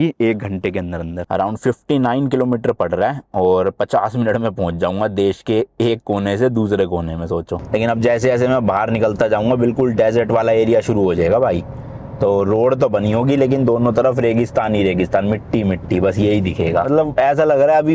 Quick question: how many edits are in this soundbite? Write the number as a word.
three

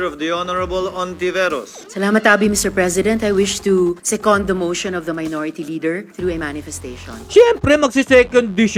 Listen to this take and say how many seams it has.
zero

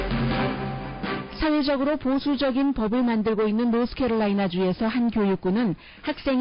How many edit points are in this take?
one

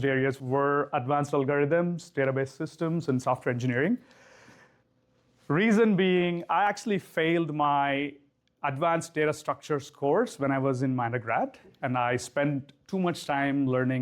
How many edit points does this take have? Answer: zero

